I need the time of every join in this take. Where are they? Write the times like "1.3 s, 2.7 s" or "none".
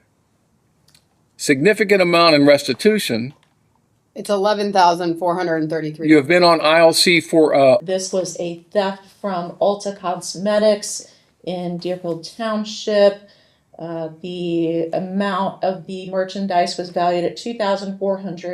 7.9 s